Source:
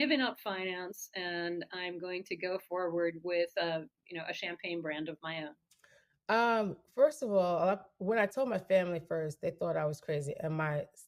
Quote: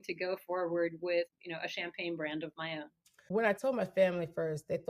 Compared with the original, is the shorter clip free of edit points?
no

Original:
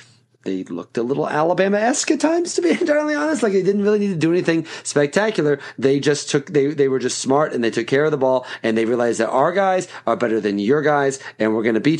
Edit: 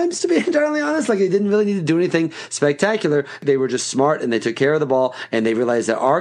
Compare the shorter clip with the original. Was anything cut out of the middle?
yes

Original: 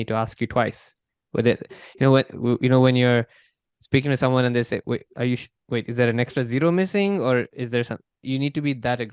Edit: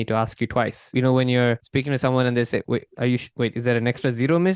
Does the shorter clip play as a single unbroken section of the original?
no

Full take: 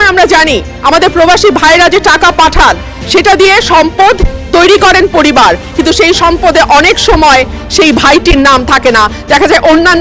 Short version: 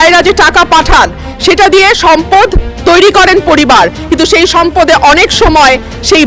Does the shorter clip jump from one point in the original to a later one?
no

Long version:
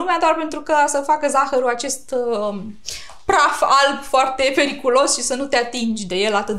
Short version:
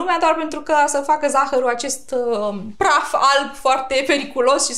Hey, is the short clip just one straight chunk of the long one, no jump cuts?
no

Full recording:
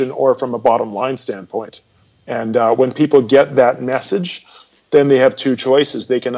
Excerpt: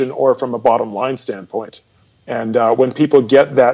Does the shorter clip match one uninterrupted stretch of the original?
yes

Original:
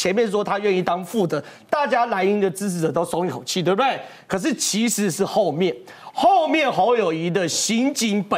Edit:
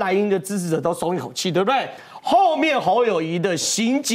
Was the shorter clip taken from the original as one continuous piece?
no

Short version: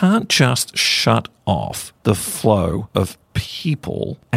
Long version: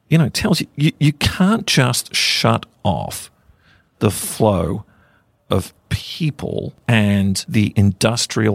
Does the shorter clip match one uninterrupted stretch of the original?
no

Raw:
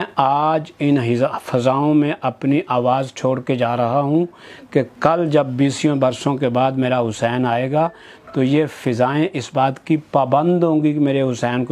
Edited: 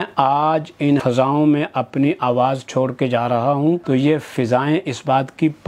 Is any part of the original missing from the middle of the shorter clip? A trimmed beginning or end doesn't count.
yes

